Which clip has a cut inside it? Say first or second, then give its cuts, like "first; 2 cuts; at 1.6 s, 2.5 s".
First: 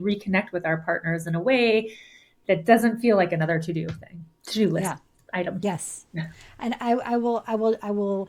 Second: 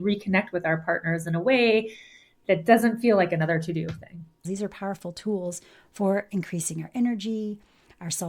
second; 1 cut; at 4.4 s